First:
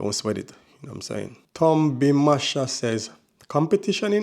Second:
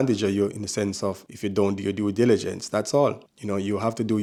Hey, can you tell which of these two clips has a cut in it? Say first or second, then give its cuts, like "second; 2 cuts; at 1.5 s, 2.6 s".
first; 1 cut; at 1.4 s